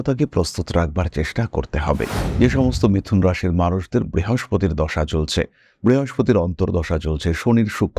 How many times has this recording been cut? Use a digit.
1